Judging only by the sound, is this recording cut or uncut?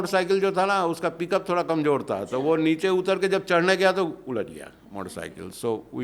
uncut